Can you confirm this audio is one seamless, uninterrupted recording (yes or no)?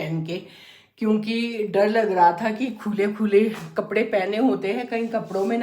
yes